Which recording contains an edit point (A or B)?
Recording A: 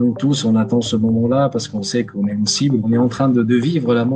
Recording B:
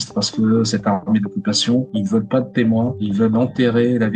A